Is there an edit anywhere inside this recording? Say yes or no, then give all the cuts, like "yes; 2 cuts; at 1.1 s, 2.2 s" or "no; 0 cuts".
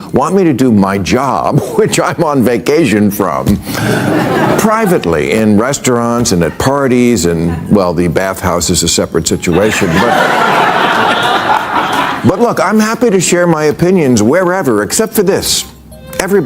no; 0 cuts